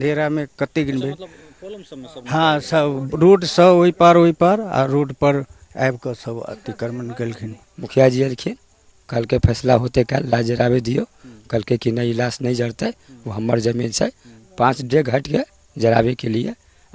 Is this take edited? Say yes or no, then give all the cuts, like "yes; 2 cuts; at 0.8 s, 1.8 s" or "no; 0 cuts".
yes; 1 cut; at 7.7 s